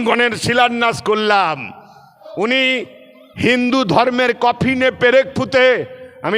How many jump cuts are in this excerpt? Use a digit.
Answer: 1